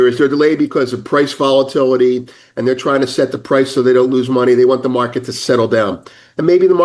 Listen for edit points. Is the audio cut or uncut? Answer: uncut